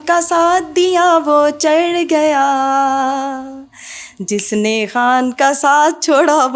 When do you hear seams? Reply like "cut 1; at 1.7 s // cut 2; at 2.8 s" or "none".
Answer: none